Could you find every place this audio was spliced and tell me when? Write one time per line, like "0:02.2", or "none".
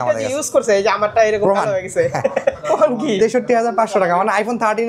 0:02.6